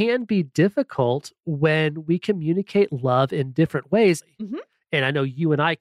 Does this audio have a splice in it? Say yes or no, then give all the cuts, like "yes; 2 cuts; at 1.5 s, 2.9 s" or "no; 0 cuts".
yes; 1 cut; at 4.3 s